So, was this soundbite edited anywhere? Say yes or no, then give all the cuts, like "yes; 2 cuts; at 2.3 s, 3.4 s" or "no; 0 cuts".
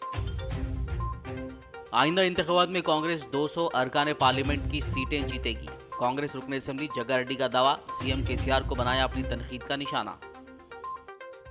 no; 0 cuts